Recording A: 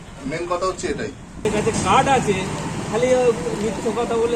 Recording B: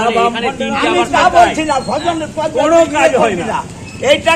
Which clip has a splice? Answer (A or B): A